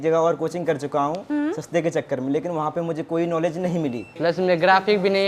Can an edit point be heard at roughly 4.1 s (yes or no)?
yes